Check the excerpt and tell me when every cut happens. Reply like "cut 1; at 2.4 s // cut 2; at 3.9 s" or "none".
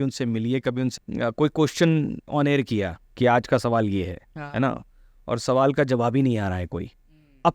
cut 1; at 1.0 s